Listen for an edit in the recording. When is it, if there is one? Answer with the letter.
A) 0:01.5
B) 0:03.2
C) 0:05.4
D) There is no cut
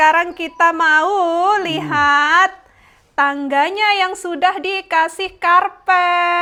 D